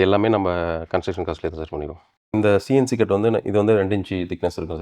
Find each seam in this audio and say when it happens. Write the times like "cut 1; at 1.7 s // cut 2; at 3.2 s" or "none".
cut 1; at 2.3 s